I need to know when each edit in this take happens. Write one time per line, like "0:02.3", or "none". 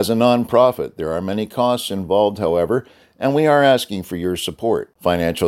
none